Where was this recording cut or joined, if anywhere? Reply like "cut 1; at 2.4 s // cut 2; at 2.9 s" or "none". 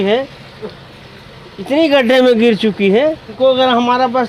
cut 1; at 3.3 s